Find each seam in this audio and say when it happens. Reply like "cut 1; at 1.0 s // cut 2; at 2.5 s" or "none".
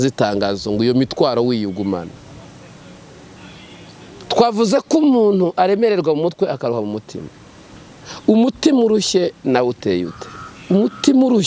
none